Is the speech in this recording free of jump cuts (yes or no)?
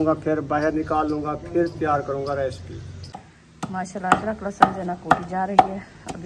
no